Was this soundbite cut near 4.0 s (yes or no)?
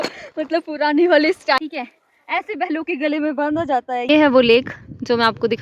yes